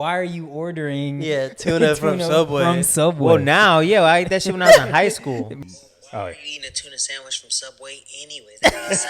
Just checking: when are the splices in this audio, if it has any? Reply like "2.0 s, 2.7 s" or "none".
5.5 s